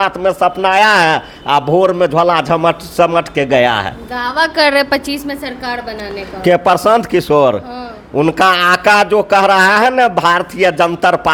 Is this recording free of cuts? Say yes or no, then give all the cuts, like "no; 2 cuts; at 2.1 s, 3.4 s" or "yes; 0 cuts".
yes; 0 cuts